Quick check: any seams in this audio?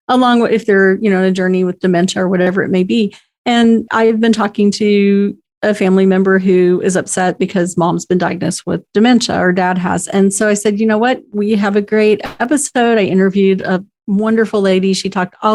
no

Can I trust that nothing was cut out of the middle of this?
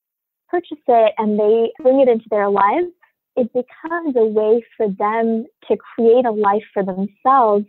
no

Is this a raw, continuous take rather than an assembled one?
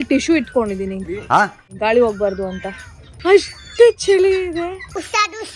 no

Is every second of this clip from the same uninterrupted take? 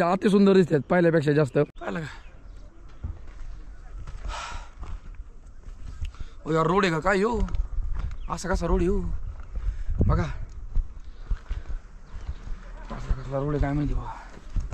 no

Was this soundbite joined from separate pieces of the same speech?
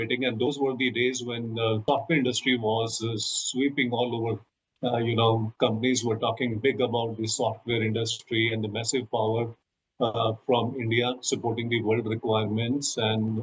yes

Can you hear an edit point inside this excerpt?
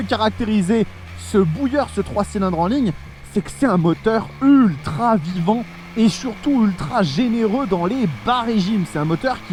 no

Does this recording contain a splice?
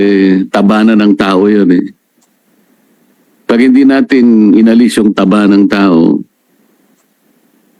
no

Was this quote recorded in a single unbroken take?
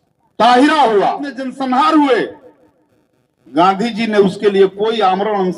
no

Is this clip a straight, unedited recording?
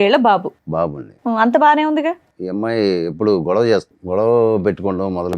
no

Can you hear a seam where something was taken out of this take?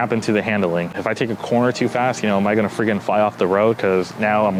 no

